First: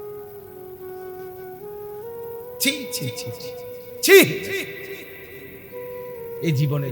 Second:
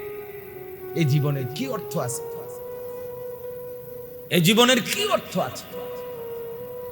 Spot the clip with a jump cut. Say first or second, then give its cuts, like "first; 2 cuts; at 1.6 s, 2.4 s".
second; 1 cut; at 1.0 s